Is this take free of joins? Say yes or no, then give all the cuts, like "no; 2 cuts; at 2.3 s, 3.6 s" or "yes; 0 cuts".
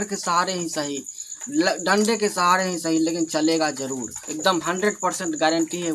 yes; 0 cuts